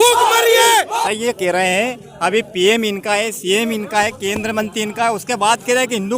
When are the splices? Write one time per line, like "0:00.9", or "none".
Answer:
0:01.0

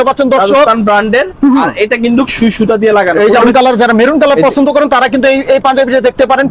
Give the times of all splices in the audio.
0:03.5

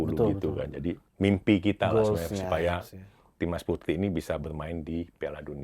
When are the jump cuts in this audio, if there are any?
0:01.1

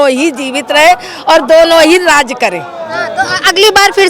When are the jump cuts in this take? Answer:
none

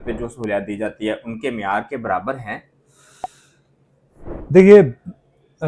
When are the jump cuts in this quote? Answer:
none

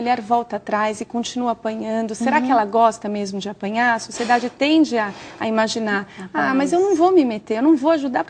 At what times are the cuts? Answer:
none

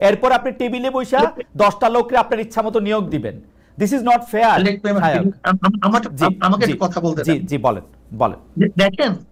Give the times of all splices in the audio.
none

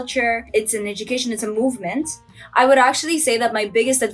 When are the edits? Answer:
0:02.4

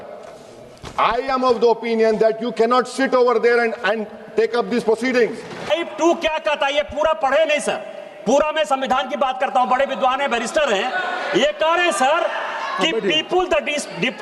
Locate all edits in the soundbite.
0:05.7

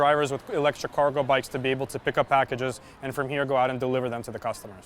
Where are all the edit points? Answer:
none

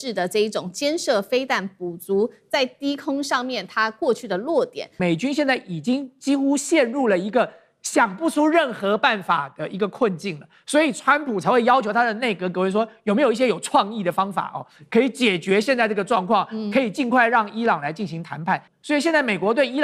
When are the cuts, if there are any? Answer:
0:04.9
0:18.7

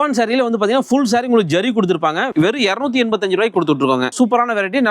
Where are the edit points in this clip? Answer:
0:02.3
0:04.1

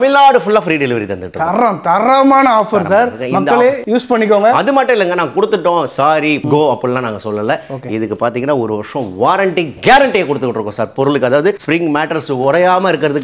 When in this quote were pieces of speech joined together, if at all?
none

